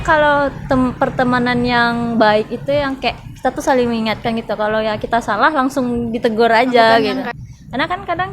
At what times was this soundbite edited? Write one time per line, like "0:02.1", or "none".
0:07.3